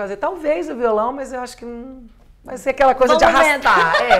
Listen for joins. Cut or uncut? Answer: uncut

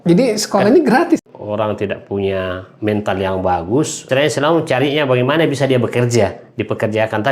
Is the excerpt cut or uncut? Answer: cut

